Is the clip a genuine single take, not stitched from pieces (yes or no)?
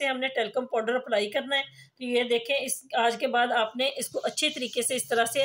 yes